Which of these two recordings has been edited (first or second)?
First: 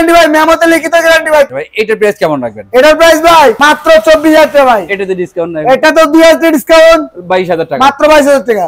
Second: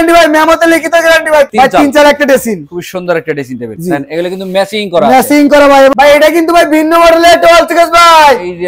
second